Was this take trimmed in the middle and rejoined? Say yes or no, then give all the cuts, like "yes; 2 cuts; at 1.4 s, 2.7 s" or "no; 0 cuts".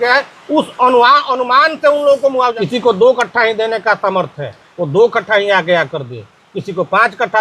yes; 1 cut; at 2.5 s